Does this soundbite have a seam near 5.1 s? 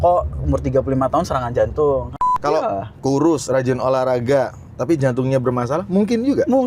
no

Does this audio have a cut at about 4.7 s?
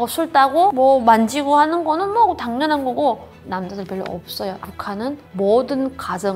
no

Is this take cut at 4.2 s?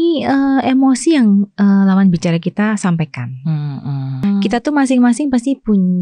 yes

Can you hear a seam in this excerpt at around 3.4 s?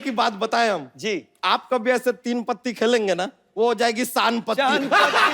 yes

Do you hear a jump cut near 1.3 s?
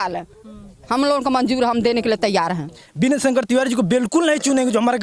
no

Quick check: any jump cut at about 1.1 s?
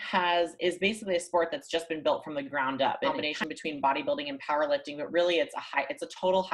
no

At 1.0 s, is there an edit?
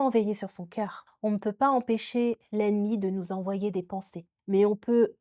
yes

